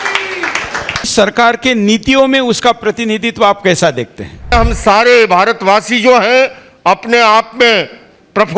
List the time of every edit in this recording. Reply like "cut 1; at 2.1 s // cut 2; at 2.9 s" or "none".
cut 1; at 1.1 s // cut 2; at 4.5 s